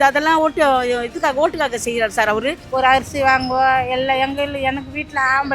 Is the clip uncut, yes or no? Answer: no